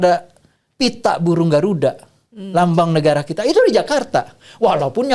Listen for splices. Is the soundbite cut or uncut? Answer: uncut